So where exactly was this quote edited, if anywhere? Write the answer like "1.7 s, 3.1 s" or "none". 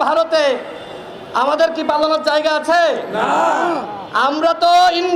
none